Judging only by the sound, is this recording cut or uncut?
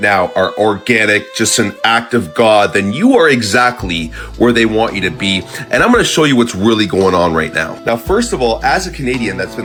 uncut